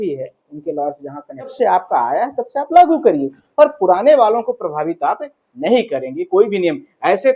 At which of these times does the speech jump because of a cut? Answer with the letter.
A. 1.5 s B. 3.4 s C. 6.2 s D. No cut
A